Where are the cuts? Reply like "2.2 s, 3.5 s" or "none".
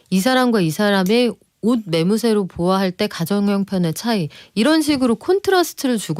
none